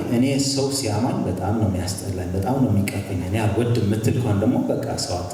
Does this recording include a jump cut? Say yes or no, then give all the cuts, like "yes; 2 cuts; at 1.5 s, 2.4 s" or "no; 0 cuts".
no; 0 cuts